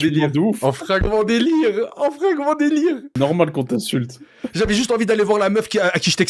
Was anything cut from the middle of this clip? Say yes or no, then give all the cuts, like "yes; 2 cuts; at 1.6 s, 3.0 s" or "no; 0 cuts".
no; 0 cuts